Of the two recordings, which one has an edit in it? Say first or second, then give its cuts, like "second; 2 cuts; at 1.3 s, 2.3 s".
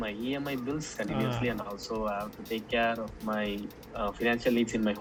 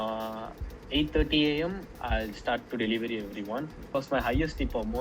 second; 1 cut; at 3.9 s